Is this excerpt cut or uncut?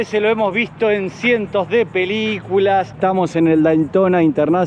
cut